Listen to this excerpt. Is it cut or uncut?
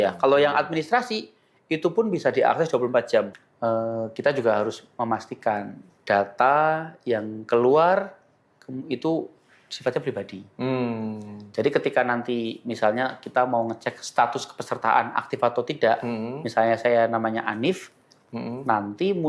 cut